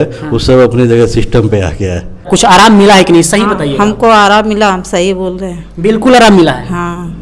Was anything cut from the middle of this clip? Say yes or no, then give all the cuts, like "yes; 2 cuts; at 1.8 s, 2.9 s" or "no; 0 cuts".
yes; 1 cut; at 2.3 s